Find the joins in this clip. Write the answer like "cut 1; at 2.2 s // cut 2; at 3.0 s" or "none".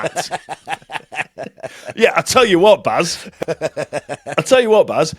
none